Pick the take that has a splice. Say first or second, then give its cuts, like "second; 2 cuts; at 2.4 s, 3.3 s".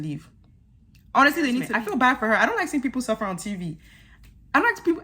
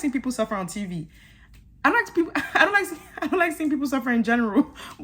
first; 1 cut; at 1.7 s